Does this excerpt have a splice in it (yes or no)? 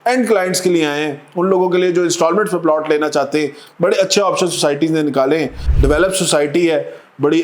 yes